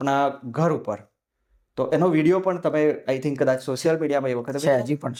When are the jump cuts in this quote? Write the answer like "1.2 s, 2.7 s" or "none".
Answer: none